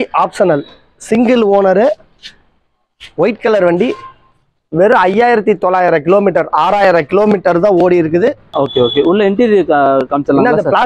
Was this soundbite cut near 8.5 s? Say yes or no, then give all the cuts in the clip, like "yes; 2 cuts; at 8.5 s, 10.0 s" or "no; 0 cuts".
yes; 1 cut; at 8.5 s